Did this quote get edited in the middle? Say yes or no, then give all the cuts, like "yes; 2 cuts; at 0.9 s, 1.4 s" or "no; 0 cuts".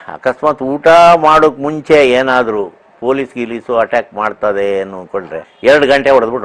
yes; 1 cut; at 5.4 s